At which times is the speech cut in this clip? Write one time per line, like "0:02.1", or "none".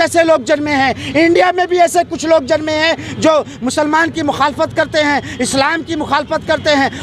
none